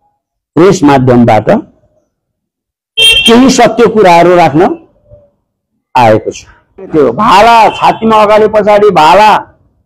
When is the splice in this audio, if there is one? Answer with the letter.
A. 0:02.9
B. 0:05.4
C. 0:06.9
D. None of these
C